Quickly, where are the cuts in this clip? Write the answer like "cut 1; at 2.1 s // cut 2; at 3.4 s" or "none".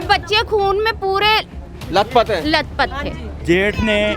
cut 1; at 3.3 s

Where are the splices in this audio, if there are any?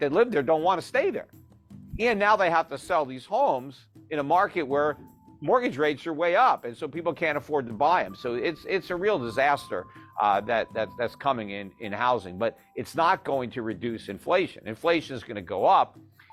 none

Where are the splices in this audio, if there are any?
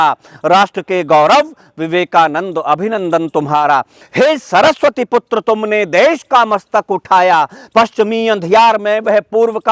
cut 1; at 4.0 s

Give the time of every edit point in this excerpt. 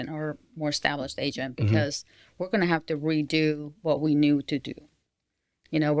none

